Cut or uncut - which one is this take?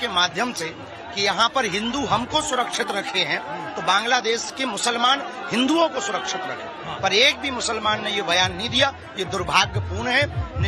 cut